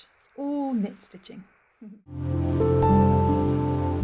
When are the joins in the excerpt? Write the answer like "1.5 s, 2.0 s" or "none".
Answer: 2.0 s